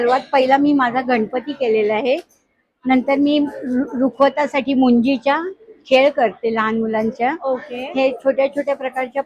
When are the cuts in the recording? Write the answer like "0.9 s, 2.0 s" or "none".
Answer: none

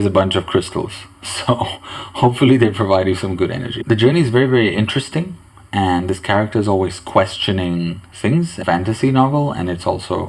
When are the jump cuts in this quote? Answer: 3.7 s, 8.6 s

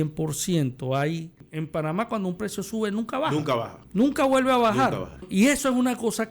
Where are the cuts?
1.5 s, 3.8 s, 5.3 s

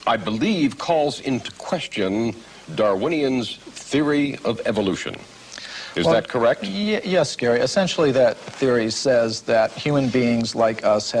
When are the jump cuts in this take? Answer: none

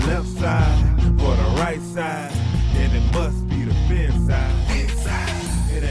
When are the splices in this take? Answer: none

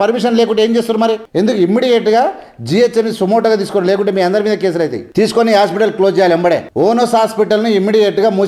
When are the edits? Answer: 1.2 s, 5.0 s, 6.7 s

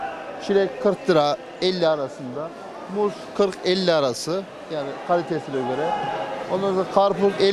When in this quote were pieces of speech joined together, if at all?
none

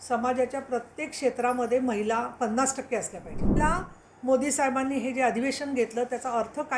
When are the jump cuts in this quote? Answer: 3.6 s

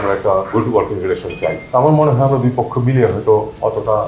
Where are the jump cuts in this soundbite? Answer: 1.6 s

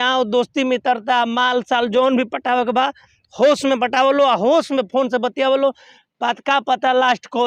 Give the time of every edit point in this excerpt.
none

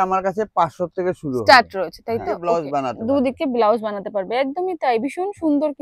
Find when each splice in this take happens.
2.4 s

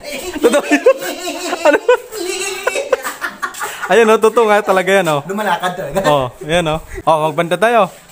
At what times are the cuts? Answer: 6.9 s

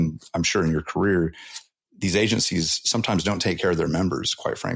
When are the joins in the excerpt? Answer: none

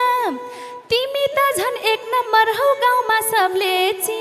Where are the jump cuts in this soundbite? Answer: none

